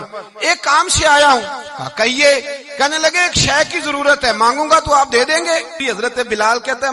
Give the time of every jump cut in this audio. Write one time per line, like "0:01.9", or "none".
0:05.8